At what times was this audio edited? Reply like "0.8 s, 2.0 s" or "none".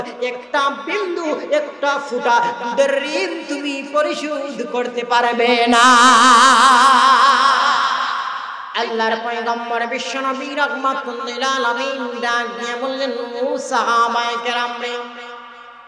8.6 s